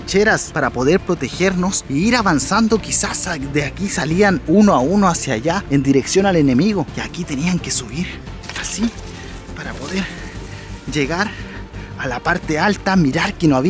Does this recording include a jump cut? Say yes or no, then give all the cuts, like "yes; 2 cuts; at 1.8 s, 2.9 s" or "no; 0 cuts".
no; 0 cuts